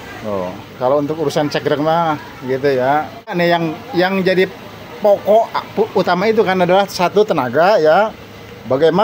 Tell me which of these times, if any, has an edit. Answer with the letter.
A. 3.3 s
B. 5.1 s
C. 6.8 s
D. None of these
A